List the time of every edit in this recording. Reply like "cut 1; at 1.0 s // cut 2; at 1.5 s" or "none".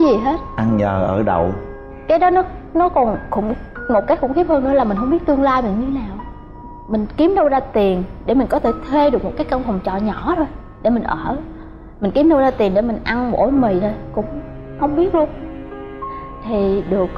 none